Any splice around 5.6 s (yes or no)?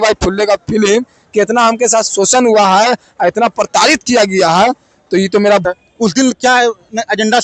yes